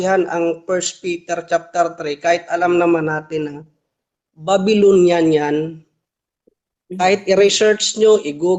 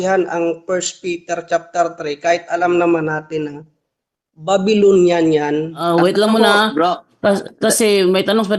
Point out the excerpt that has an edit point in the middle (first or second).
second